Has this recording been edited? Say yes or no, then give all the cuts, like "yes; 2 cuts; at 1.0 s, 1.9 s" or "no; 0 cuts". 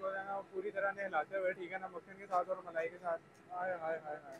no; 0 cuts